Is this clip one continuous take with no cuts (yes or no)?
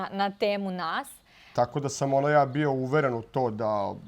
no